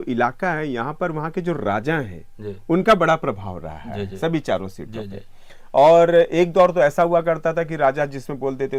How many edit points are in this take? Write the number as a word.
zero